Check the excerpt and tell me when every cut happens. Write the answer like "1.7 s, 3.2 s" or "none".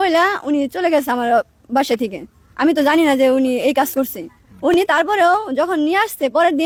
none